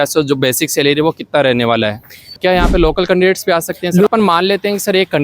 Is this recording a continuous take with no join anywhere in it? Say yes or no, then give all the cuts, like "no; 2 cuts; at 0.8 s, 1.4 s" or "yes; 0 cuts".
no; 2 cuts; at 2.4 s, 4.1 s